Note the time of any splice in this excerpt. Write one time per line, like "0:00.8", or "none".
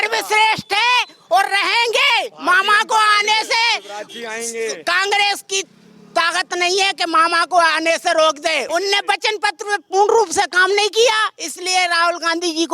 0:08.6